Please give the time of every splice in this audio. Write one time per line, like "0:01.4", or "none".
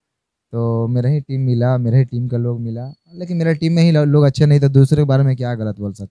none